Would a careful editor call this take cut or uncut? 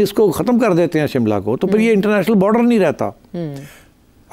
uncut